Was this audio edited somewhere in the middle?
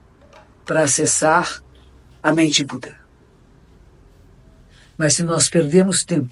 no; 0 cuts

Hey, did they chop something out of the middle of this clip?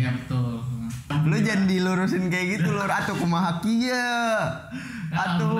yes; 1 cut; at 1.1 s

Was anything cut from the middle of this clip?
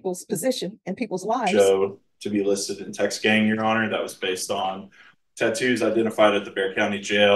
yes; 1 cut; at 1.4 s

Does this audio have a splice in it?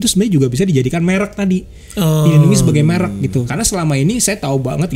yes; 1 cut; at 3.5 s

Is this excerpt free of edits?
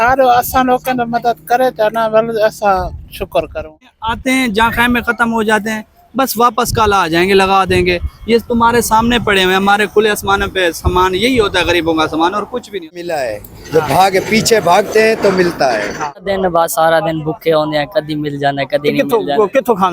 no; 3 cuts; at 4.0 s, 13.0 s, 16.3 s

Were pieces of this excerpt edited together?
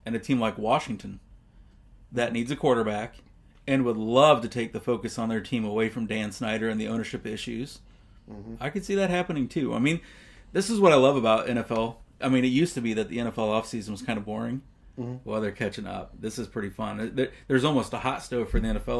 no; 0 cuts

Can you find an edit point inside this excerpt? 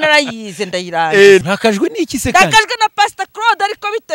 yes; 1 cut; at 1.4 s

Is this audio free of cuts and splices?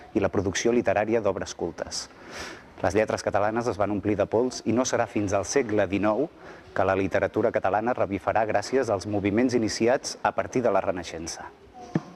yes; 0 cuts

